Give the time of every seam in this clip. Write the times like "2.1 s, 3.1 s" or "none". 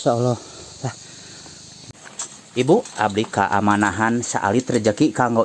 1.8 s